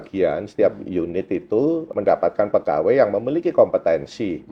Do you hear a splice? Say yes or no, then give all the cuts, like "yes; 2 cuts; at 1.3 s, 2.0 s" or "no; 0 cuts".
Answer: yes; 1 cut; at 1.9 s